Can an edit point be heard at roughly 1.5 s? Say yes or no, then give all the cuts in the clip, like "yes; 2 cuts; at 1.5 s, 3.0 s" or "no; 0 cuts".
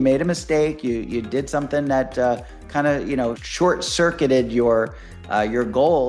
no; 1 cut; at 3.4 s